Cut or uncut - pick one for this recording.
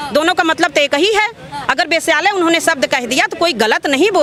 uncut